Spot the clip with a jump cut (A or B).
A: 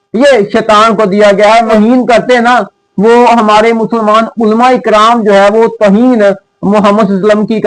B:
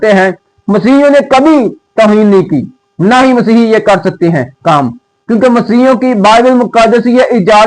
A